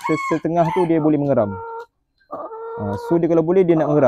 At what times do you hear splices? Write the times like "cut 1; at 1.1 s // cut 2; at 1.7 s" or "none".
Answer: none